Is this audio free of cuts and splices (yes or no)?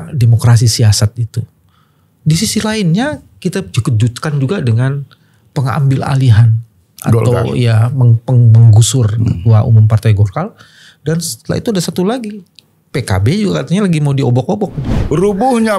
no